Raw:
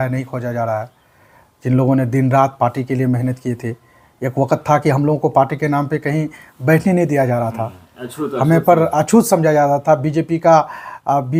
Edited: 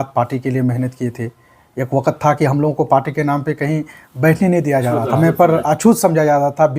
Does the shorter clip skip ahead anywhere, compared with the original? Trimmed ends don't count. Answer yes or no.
yes